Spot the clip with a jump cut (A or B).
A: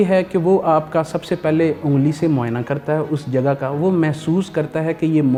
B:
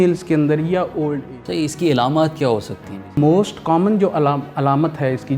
B